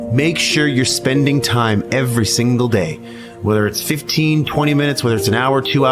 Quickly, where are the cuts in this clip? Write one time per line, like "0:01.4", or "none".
none